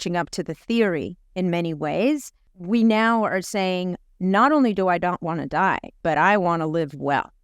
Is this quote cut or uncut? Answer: cut